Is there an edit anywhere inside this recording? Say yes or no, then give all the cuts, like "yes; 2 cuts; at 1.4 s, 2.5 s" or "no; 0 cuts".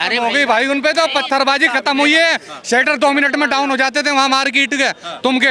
no; 0 cuts